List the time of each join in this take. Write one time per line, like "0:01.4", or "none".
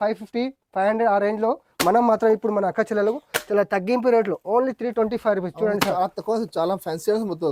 none